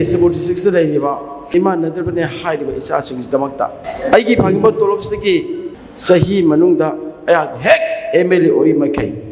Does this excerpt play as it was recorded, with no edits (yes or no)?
no